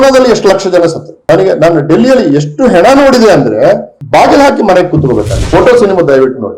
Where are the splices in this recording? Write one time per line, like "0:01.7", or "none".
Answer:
0:01.1
0:05.3